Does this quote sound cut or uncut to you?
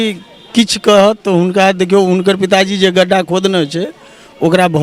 uncut